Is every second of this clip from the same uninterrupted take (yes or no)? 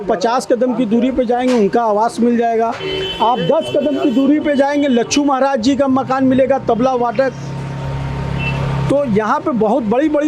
yes